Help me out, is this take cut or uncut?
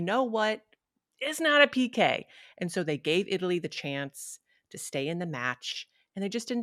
uncut